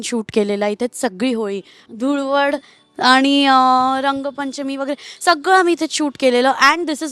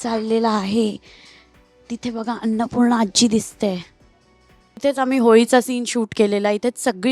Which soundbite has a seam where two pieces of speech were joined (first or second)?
second